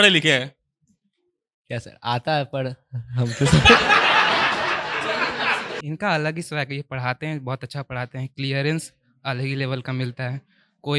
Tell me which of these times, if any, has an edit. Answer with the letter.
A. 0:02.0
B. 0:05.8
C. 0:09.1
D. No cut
B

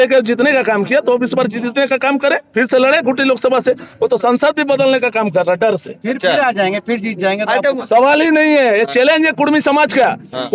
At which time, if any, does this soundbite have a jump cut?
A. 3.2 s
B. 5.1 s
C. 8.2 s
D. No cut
D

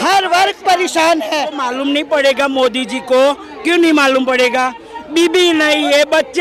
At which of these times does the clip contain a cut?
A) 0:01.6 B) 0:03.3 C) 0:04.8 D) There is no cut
A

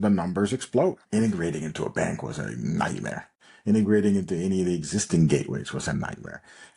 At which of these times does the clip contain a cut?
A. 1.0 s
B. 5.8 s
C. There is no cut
A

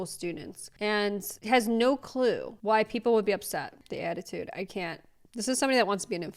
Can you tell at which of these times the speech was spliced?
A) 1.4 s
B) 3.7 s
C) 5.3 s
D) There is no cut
B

